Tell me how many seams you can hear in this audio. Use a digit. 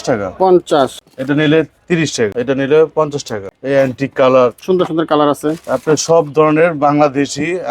3